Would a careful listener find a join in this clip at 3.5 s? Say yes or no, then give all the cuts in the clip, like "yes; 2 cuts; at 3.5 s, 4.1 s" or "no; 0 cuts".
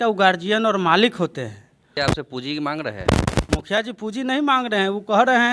no; 1 cut; at 1.9 s